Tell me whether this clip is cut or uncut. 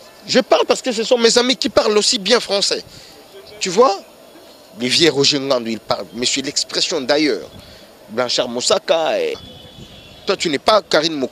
cut